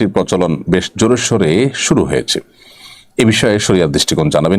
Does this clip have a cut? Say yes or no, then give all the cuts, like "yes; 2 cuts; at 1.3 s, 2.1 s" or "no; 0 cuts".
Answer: no; 0 cuts